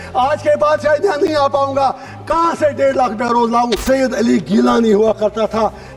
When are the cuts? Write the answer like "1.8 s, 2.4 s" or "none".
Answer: 3.8 s